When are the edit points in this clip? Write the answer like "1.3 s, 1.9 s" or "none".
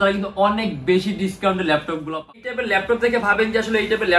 2.5 s